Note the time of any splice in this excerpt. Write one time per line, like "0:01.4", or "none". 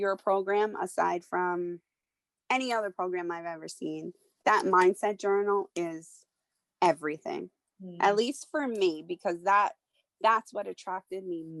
none